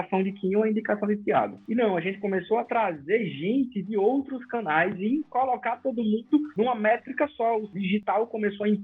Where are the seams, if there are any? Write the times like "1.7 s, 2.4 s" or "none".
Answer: 1.6 s, 6.5 s, 7.7 s